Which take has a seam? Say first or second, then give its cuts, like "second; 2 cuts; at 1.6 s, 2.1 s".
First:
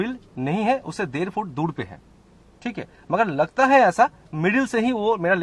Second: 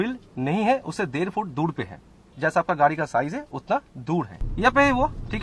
second; 2 cuts; at 2.3 s, 4.3 s